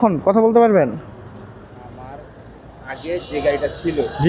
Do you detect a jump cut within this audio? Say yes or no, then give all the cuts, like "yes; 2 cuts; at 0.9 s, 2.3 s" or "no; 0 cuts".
no; 0 cuts